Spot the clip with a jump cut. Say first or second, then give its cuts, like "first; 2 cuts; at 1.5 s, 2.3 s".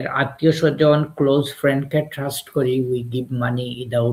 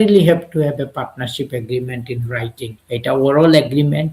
second; 1 cut; at 2.8 s